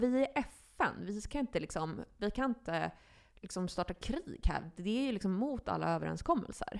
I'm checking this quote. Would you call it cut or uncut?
uncut